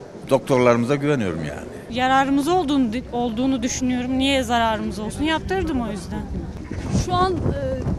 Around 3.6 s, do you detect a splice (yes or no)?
no